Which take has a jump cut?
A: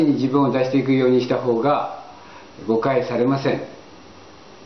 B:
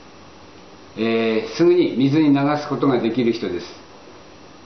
A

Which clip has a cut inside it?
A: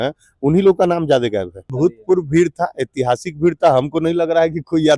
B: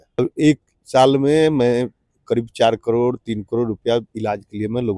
A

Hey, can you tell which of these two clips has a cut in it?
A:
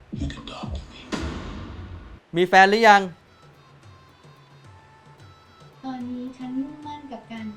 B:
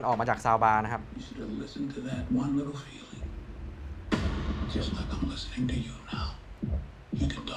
A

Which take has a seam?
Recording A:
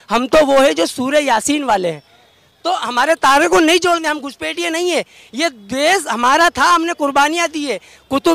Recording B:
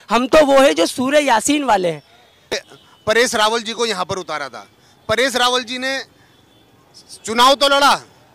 B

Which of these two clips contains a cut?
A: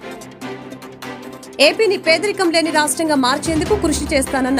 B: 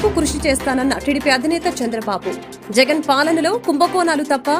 A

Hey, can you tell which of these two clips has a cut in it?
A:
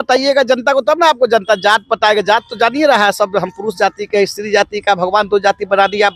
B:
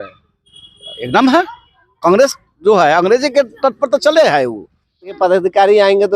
B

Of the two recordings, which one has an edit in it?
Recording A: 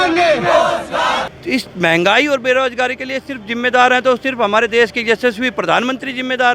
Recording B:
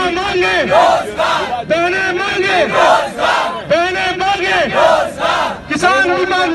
A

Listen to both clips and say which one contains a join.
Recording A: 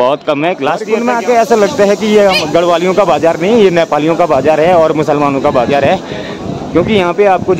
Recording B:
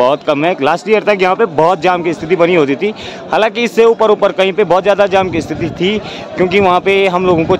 A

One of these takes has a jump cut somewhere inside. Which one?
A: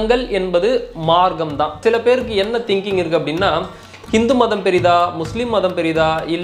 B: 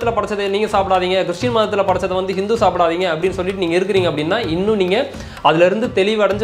A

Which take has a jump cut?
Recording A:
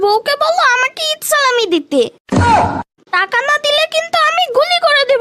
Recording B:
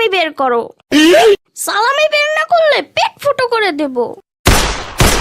B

